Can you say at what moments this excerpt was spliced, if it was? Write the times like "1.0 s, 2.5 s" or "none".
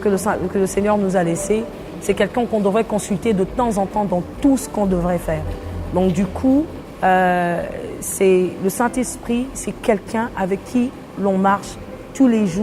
none